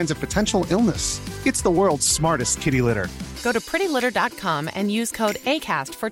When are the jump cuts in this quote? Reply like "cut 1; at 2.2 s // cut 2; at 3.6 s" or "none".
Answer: none